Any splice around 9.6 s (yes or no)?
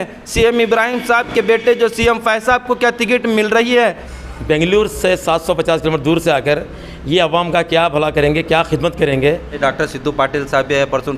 yes